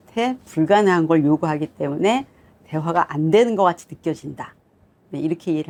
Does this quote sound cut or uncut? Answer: uncut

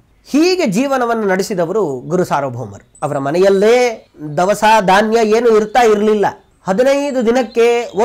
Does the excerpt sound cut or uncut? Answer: cut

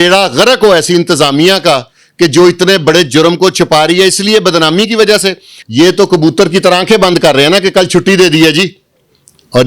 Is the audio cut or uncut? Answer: cut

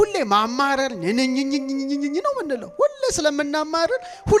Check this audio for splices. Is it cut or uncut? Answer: uncut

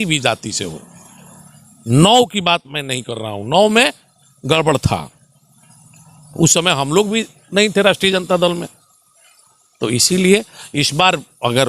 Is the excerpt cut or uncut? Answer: uncut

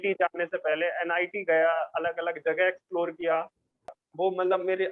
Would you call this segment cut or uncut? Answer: cut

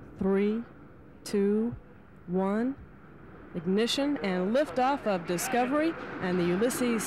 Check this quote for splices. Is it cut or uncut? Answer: uncut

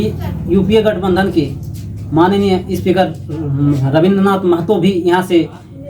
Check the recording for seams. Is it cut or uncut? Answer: uncut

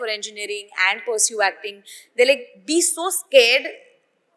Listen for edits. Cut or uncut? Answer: uncut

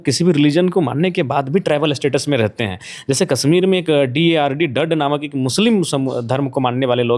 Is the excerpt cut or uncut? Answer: uncut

